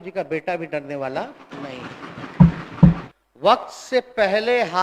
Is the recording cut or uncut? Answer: cut